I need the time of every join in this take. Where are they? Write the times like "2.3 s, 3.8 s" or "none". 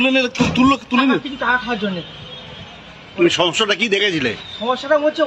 none